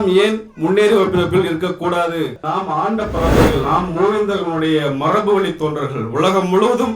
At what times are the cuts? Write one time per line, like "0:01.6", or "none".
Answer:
0:02.4